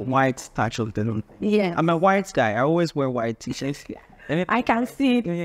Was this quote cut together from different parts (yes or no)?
no